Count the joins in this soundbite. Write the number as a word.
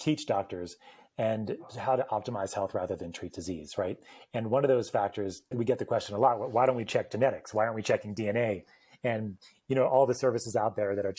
two